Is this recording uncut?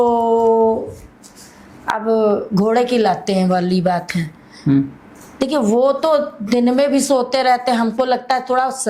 yes; 0 cuts

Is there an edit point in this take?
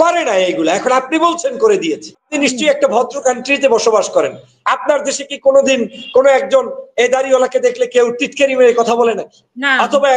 yes; 1 cut; at 2.3 s

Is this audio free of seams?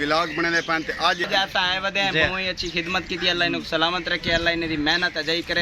no; 1 cut; at 1.2 s

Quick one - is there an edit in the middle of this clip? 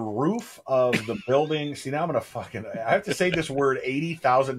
no; 0 cuts

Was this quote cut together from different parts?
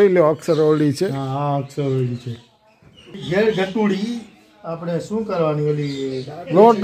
yes; 1 cut; at 3.2 s

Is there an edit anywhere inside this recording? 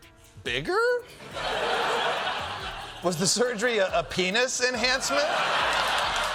no; 0 cuts

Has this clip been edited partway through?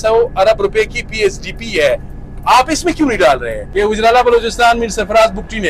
yes; 1 cut; at 3.6 s

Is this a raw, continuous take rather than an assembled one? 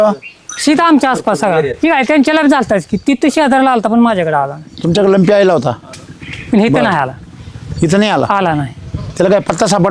yes; 0 cuts

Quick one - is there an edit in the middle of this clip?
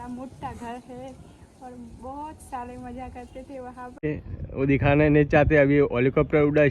yes; 1 cut; at 4.0 s

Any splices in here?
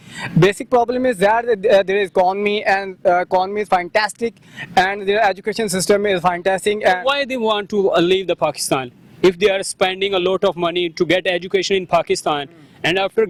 no; 0 cuts

